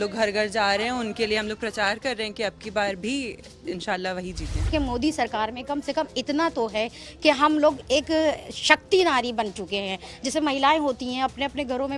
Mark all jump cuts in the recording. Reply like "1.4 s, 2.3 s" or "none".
4.7 s